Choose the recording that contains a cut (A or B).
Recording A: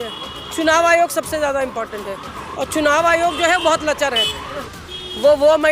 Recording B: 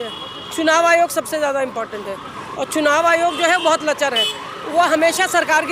A